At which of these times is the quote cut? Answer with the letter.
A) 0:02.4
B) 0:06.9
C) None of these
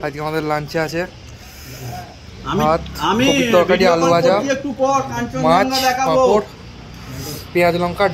C